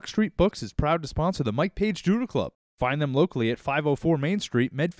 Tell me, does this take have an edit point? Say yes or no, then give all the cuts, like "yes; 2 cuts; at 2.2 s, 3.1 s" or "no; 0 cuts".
yes; 1 cut; at 2.6 s